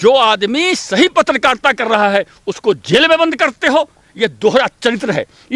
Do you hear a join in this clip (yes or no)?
no